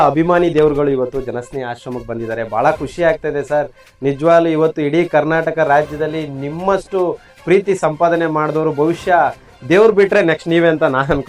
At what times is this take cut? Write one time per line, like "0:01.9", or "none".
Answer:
none

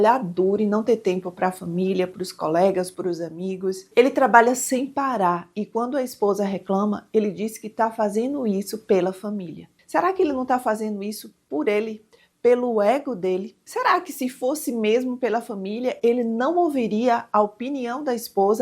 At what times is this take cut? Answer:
0:03.7
0:13.6

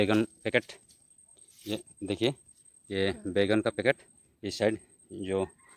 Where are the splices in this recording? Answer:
none

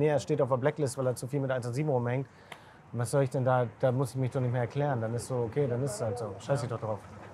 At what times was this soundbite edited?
none

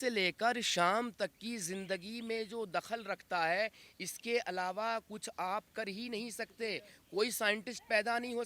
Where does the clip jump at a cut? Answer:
none

